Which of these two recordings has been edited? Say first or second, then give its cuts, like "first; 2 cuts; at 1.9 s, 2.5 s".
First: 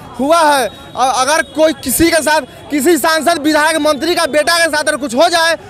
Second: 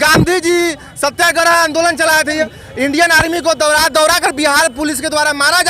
second; 1 cut; at 2.4 s